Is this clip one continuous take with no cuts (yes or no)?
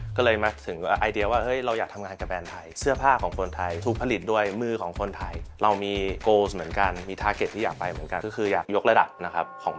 yes